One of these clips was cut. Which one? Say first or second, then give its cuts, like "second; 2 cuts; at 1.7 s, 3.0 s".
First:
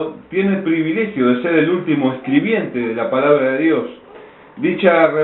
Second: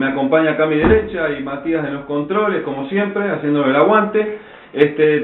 second; 1 cut; at 3.6 s